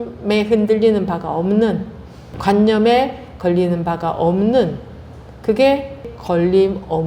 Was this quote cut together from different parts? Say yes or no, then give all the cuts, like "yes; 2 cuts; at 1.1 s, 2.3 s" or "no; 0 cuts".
yes; 2 cuts; at 2.3 s, 6.1 s